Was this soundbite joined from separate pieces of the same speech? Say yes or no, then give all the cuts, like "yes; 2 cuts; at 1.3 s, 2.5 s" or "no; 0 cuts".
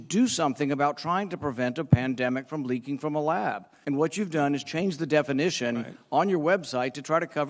yes; 1 cut; at 3.7 s